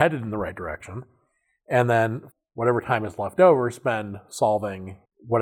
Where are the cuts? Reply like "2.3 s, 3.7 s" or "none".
2.2 s